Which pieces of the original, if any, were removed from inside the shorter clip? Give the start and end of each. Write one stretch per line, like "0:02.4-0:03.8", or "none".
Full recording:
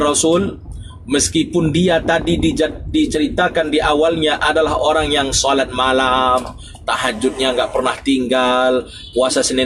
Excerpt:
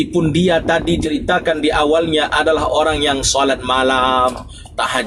0:02.4-0:03.1